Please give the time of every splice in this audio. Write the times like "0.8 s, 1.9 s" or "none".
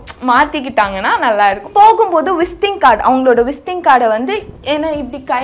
1.7 s